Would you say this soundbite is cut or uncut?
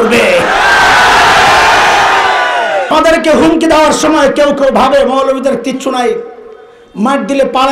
cut